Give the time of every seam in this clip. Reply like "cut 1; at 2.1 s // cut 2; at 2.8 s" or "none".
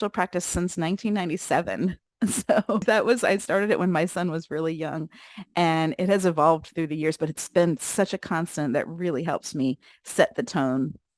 cut 1; at 2.8 s